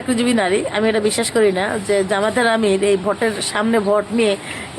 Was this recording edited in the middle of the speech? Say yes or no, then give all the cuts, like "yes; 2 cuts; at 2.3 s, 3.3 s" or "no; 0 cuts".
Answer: no; 0 cuts